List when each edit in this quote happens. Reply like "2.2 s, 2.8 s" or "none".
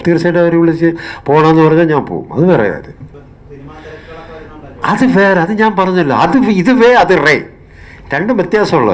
3.1 s